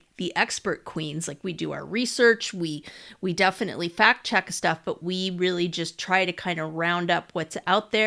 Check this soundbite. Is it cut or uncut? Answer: uncut